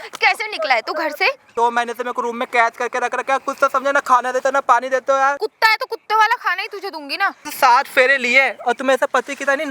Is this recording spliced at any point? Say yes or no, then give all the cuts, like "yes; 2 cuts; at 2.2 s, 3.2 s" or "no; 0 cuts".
yes; 3 cuts; at 1.4 s, 5.5 s, 7.5 s